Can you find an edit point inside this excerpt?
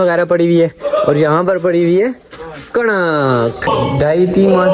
yes; 1 cut; at 3.7 s

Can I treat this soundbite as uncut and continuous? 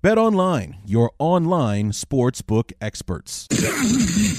no; 1 cut; at 3.3 s

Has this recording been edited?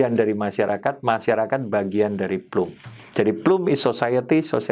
no; 0 cuts

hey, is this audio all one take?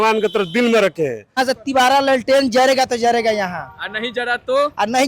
no; 1 cut; at 1.4 s

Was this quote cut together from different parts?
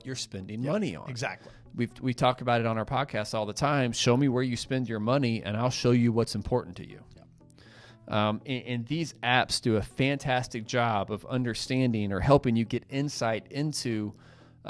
no; 0 cuts

